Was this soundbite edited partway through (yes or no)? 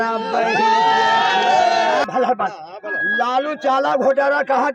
yes